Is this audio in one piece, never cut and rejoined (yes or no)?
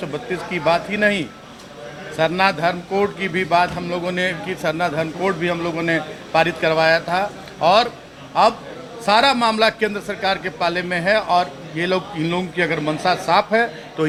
yes